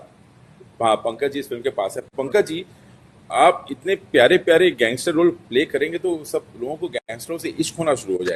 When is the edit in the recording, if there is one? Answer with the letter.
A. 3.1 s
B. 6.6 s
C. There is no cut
C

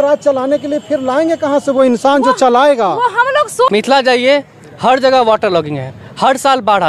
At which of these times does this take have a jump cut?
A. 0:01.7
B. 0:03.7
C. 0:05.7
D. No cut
B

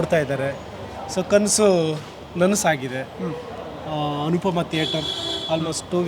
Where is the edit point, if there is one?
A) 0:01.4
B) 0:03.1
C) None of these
C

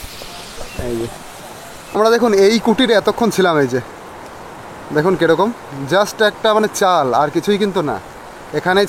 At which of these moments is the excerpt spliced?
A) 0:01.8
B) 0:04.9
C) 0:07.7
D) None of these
A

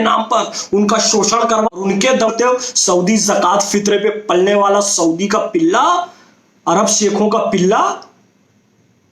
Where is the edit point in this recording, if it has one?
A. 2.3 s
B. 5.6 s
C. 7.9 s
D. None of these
A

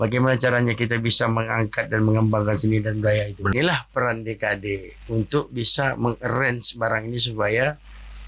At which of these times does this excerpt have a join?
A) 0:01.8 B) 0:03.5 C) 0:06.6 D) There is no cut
B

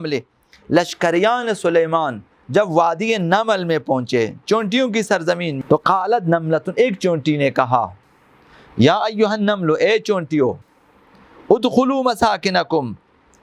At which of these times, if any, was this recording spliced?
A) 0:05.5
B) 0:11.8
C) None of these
A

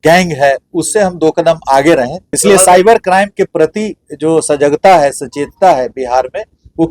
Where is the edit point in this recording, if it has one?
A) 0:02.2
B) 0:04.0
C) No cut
A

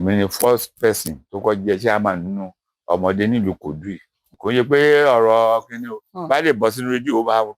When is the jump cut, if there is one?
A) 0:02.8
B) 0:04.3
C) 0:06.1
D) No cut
B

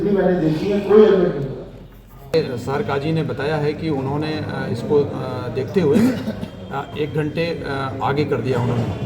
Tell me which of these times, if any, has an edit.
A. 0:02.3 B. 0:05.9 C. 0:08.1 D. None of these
A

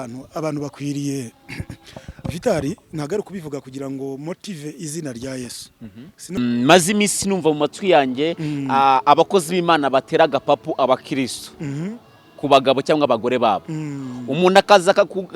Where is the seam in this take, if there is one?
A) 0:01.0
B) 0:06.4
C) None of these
B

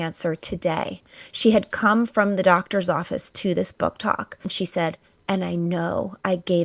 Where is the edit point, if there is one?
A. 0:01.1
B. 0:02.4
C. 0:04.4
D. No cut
C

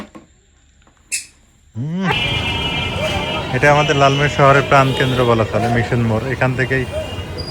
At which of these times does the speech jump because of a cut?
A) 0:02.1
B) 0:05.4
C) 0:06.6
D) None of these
A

